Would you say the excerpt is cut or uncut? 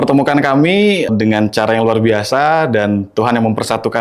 cut